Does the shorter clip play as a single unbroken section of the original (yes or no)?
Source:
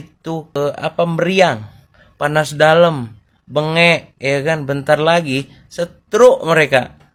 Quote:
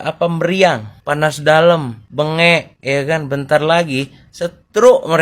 no